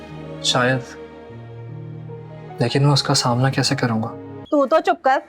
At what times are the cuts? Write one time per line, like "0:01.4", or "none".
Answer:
0:04.3